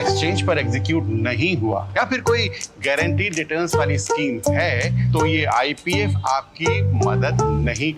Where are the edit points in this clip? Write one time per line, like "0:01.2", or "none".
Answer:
none

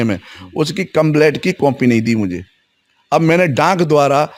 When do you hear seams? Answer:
none

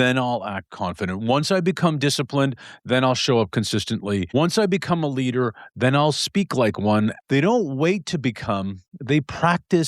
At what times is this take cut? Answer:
0:04.3
0:07.2

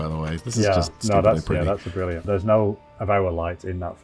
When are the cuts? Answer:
0:02.2

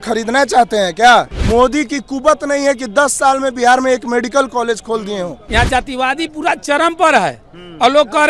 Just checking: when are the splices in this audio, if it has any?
0:01.4
0:05.4

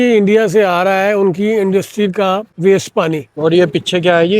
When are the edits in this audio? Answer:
0:02.5
0:03.4

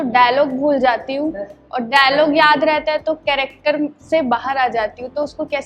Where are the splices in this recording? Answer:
none

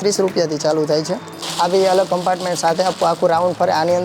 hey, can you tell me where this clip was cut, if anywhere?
0:01.2

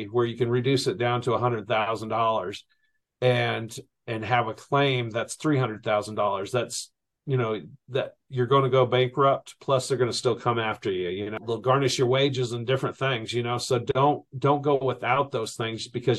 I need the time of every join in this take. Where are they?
0:11.4

